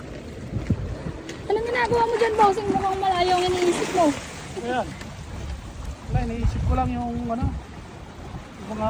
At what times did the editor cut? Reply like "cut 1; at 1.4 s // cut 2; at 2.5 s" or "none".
none